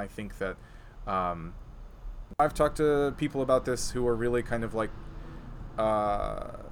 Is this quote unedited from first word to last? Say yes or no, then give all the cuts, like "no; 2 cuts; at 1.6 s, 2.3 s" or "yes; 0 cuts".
no; 1 cut; at 2.4 s